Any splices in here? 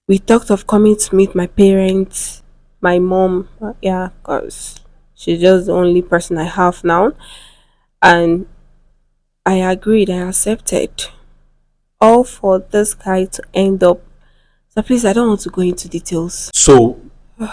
yes; 1 cut; at 16.4 s

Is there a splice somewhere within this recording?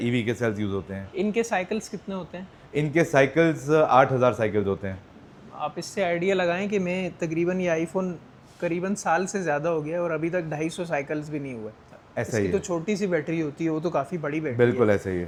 no; 0 cuts

